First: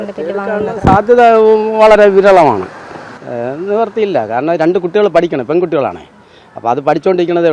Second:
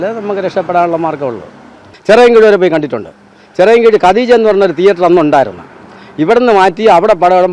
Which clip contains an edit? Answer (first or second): second